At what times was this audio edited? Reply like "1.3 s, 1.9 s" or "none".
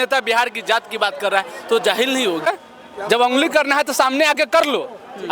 2.5 s